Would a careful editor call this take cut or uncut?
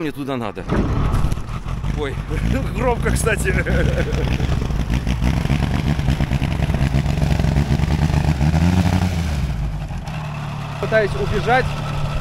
uncut